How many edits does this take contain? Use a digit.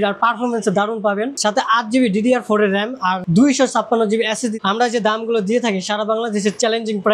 3